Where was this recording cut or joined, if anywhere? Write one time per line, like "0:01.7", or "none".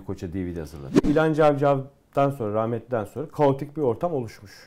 0:01.0